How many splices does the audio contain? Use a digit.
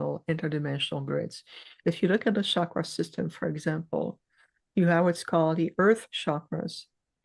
0